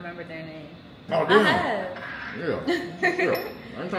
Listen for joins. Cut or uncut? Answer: cut